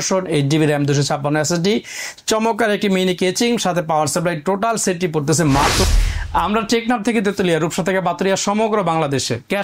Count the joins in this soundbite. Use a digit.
1